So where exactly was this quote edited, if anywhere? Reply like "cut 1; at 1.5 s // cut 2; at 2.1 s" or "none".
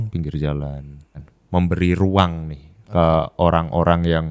cut 1; at 1.3 s